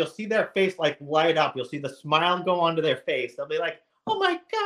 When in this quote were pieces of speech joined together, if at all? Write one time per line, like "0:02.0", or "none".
none